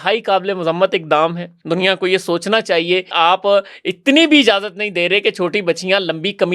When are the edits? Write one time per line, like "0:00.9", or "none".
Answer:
0:01.5
0:03.1

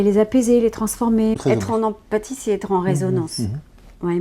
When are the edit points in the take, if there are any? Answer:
0:01.4

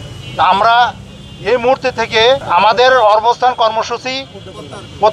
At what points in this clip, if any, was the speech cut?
0:02.4

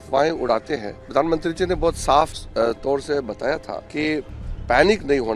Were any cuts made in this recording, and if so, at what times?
0:01.0
0:02.4
0:03.8

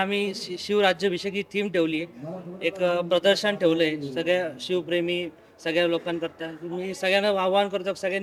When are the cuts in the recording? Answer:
none

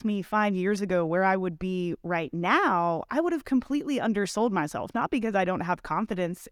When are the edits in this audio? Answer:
none

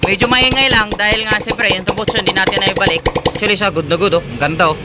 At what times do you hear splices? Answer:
0:03.4

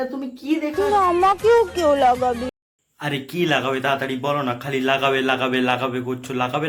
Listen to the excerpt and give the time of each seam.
none

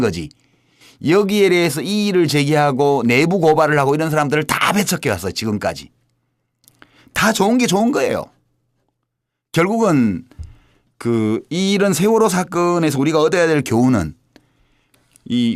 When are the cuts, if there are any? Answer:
0:13.7

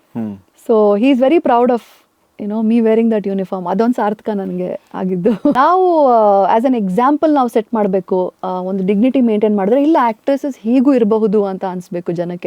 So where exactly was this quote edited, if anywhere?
0:05.6

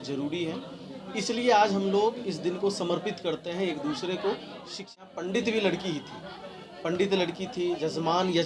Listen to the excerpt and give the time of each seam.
0:04.9

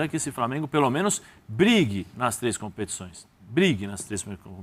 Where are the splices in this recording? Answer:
none

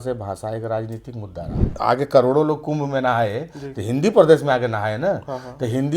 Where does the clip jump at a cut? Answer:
0:01.7

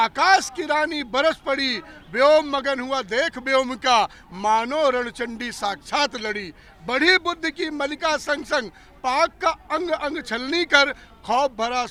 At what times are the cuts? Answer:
none

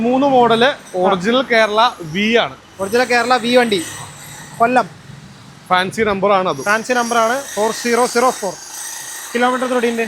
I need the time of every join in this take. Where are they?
none

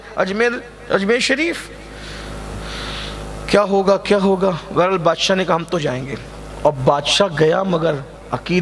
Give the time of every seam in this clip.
none

